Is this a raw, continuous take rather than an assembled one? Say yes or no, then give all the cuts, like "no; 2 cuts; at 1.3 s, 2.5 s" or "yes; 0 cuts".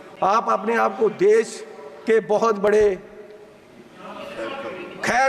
yes; 0 cuts